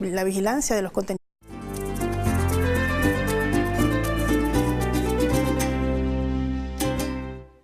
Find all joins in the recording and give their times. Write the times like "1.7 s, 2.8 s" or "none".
none